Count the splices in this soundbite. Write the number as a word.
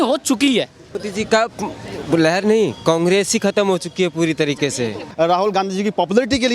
two